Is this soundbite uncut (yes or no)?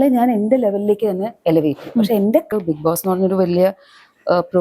no